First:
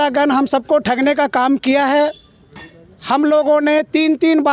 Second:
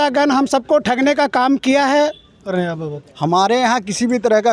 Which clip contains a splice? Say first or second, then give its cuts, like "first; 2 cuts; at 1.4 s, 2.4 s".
second; 1 cut; at 2.5 s